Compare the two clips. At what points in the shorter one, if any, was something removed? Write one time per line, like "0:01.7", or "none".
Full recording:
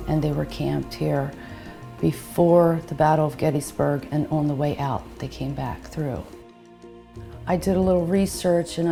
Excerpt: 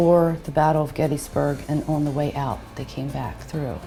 none